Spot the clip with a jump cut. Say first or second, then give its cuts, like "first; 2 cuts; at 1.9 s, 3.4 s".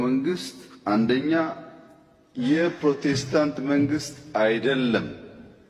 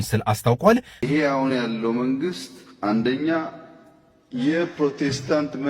second; 1 cut; at 1.1 s